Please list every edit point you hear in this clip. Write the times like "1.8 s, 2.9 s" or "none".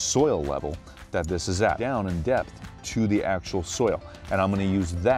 1.8 s